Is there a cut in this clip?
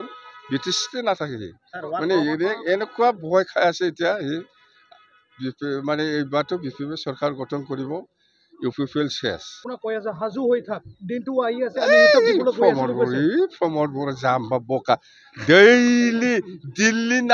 yes; 1 cut; at 9.7 s

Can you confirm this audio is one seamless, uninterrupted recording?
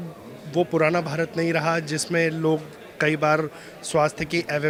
yes; 0 cuts

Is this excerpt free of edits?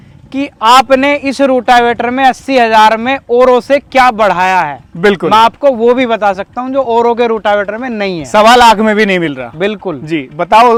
yes; 0 cuts

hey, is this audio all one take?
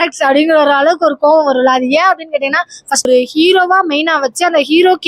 no; 1 cut; at 3.1 s

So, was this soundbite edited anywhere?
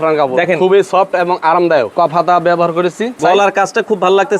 yes; 2 cuts; at 1.9 s, 3.2 s

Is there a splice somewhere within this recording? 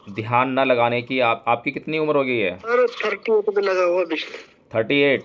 yes; 1 cut; at 2.7 s

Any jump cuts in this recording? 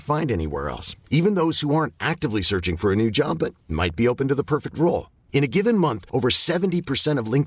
no; 0 cuts

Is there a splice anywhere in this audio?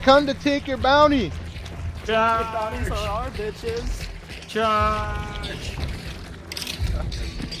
no; 0 cuts

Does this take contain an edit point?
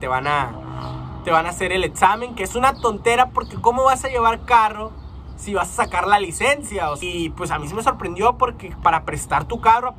yes; 1 cut; at 7.0 s

